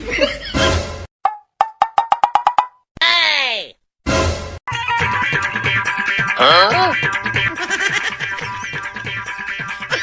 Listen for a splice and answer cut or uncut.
uncut